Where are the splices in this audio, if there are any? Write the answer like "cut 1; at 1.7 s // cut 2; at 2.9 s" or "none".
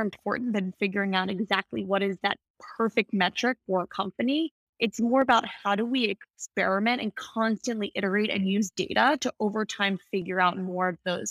none